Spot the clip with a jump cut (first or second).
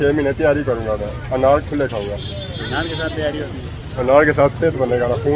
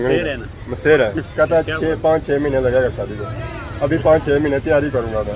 second